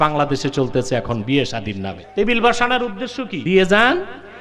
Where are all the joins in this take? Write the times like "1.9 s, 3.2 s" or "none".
2.0 s, 3.4 s